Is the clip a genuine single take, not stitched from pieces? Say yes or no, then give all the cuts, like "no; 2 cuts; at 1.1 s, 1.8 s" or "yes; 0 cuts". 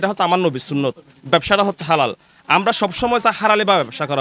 yes; 0 cuts